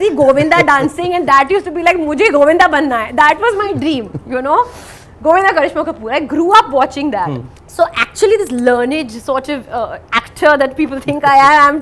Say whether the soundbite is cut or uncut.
uncut